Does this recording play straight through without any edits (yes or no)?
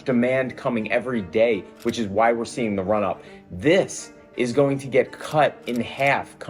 yes